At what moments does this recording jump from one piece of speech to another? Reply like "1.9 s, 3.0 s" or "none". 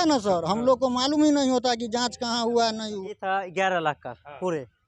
3.1 s